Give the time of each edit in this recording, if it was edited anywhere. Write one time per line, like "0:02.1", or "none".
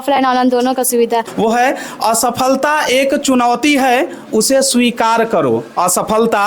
0:01.3